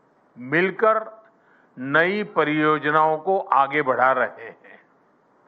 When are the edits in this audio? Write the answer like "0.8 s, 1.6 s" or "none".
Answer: 2.8 s